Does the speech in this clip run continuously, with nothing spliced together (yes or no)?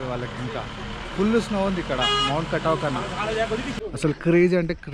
no